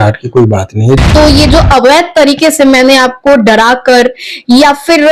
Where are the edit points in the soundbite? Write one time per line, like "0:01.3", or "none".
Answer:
0:01.0